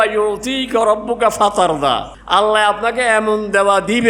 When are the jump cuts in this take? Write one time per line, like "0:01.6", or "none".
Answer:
0:02.1